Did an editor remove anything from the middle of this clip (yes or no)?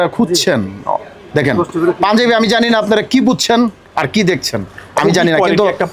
no